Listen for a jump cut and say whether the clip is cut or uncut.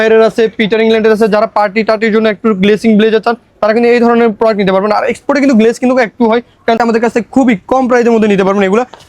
cut